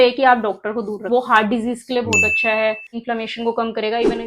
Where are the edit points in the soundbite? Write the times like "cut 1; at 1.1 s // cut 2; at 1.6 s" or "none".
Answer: cut 1; at 1.0 s // cut 2; at 3.0 s